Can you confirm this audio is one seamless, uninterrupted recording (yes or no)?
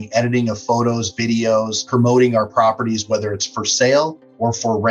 no